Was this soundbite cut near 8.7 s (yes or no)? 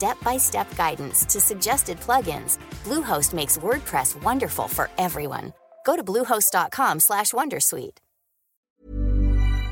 yes